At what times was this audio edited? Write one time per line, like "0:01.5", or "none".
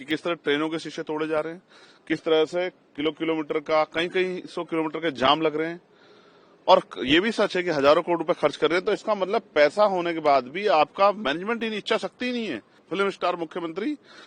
0:12.8